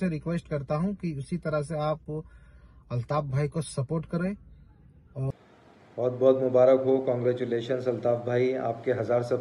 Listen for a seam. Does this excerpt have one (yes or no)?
yes